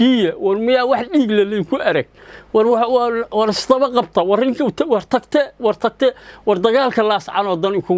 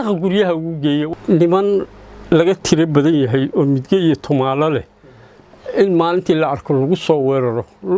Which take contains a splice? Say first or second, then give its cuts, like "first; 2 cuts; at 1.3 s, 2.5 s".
second; 1 cut; at 1.1 s